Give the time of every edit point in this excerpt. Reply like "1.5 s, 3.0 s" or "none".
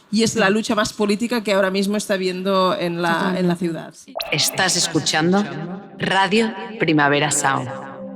3.9 s